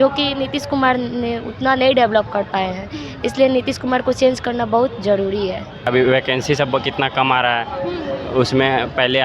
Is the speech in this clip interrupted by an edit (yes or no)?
yes